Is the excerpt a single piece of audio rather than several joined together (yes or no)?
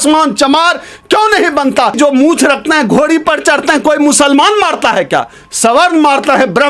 no